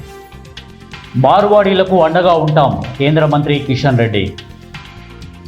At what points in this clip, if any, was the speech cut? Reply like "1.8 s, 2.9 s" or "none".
1.1 s, 4.4 s